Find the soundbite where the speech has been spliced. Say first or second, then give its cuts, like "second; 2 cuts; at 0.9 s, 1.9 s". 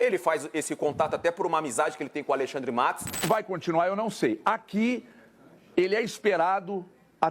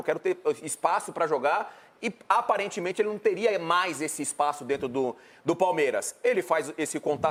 first; 1 cut; at 3.3 s